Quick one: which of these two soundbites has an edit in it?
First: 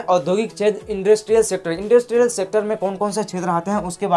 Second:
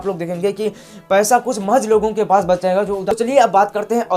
second; 1 cut; at 3.1 s

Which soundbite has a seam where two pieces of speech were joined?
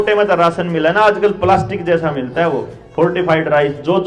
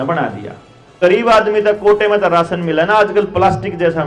second; 1 cut; at 1.0 s

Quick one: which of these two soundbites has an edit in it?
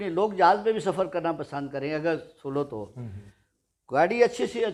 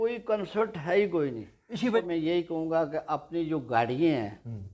second; 1 cut; at 1.9 s

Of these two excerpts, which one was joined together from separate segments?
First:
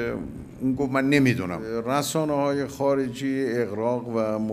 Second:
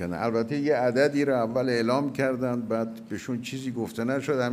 first; 1 cut; at 1.6 s

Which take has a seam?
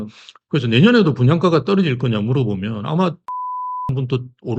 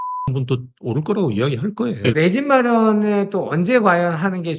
second; 1 cut; at 2.1 s

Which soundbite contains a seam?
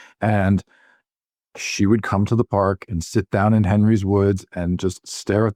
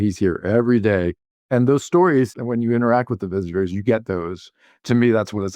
second; 3 cuts; at 1.4 s, 2.4 s, 4.8 s

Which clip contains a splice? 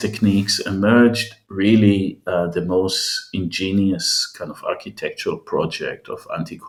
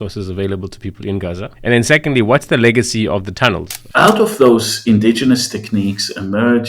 second; 2 cuts; at 1.5 s, 3.8 s

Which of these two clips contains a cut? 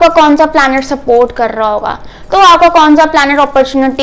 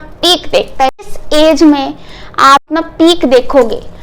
second; 2 cuts; at 1.1 s, 2.7 s

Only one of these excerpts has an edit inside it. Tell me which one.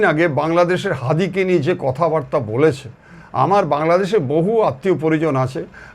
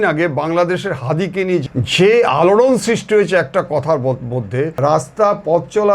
second; 2 cuts; at 1.6 s, 4.7 s

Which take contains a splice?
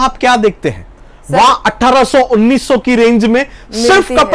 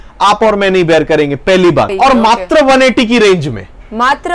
second; 1 cut; at 1.9 s

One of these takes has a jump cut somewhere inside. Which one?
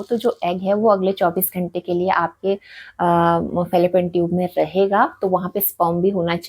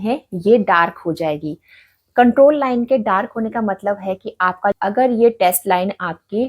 second; 1 cut; at 4.8 s

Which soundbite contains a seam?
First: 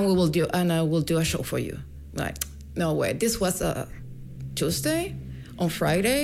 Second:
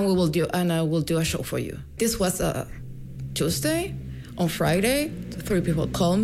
second; 1 cut; at 2.0 s

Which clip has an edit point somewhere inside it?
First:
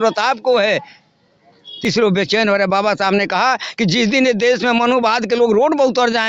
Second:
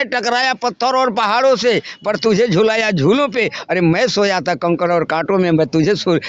first; 1 cut; at 1.7 s

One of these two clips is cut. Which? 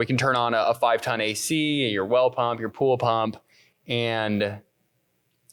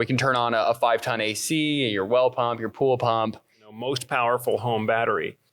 second; 1 cut; at 3.8 s

